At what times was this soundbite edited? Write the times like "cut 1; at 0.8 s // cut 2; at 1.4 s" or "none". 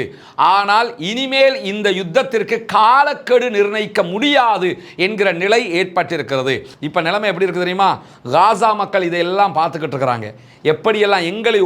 cut 1; at 6.7 s